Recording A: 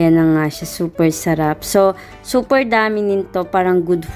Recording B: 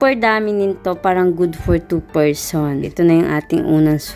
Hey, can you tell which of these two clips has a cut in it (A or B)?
B